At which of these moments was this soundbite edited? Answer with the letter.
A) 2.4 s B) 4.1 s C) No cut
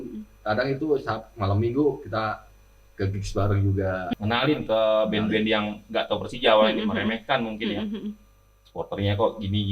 B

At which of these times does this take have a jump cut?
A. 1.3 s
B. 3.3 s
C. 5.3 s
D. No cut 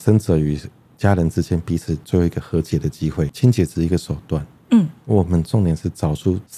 B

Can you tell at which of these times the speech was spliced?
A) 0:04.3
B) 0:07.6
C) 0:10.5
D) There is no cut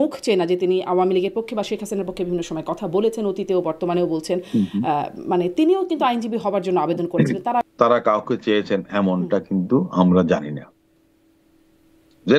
B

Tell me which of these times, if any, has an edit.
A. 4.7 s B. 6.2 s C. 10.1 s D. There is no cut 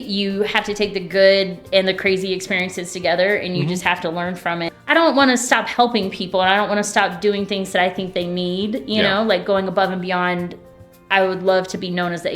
A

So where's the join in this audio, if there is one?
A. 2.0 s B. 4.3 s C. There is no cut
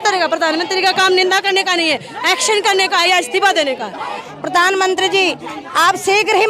B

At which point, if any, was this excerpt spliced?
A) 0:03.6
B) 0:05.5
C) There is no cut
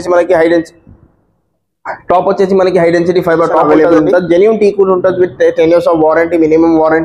A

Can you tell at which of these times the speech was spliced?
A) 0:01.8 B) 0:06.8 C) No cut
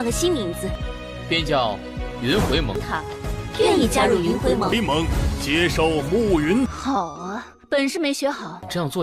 B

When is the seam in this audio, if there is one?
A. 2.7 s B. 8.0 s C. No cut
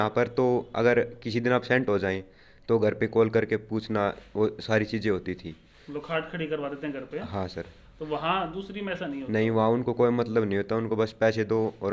C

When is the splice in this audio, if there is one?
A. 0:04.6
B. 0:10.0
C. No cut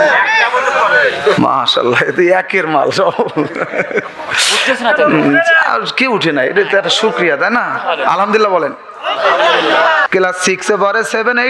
B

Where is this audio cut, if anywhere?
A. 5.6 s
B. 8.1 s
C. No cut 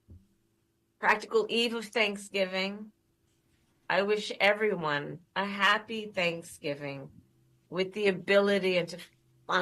C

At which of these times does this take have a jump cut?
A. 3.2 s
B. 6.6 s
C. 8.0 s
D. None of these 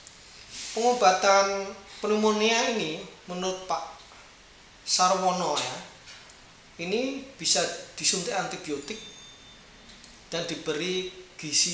D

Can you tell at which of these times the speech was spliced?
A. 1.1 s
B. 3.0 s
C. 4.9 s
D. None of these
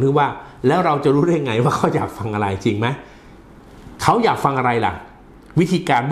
D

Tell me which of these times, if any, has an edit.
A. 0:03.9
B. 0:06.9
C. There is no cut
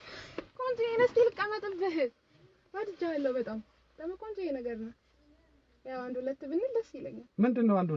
C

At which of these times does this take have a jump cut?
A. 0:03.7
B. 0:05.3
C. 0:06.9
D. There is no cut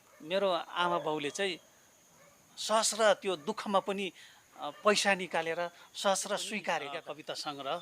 C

